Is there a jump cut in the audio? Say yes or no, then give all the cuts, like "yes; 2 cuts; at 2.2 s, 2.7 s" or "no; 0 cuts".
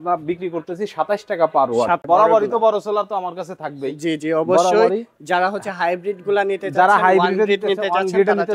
yes; 1 cut; at 2.0 s